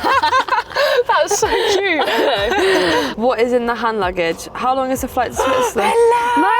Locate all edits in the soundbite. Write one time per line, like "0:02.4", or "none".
0:03.1

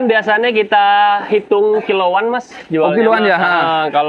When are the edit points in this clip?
none

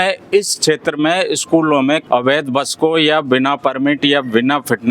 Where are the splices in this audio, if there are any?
0:02.0

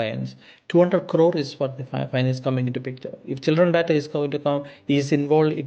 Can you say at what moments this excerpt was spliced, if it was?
none

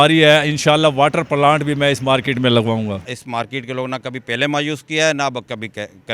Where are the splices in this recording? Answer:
0:03.1

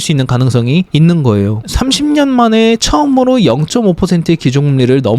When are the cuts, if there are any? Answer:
0:01.2

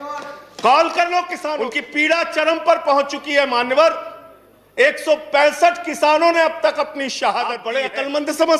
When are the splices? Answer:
0:01.8
0:07.7

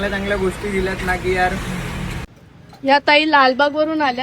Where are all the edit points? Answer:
0:02.3

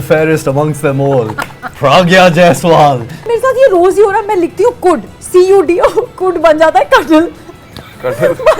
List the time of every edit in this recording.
0:03.3

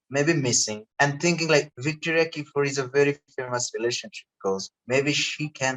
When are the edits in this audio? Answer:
0:00.9
0:01.7

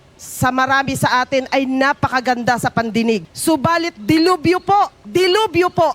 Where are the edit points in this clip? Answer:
0:03.3
0:05.0

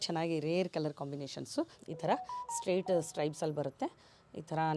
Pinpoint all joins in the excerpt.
0:01.8

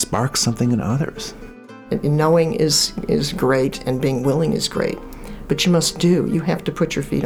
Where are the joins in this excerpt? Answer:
0:01.8

